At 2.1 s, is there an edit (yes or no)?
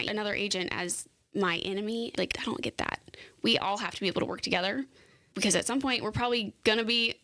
yes